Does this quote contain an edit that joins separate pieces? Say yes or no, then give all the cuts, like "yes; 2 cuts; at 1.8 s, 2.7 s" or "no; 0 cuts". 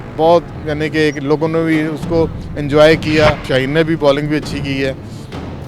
yes; 1 cut; at 3.4 s